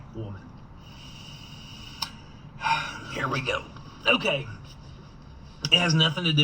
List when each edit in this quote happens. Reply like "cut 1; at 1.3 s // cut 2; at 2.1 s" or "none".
cut 1; at 3.0 s